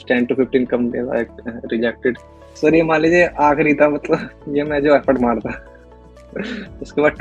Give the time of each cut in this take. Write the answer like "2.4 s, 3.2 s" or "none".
2.4 s

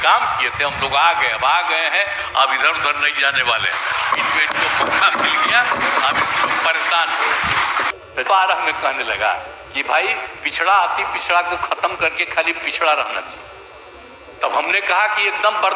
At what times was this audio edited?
7.9 s

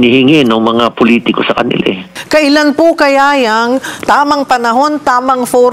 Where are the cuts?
2.1 s

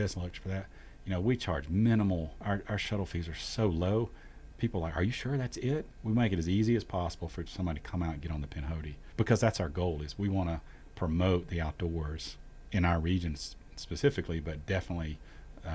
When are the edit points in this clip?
2.3 s, 5.9 s, 9.0 s

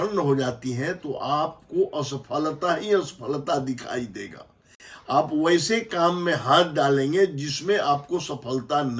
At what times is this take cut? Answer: none

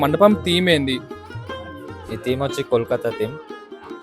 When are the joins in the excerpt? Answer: none

